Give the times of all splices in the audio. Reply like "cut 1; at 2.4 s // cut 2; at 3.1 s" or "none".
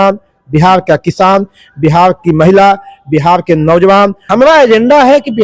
cut 1; at 4.2 s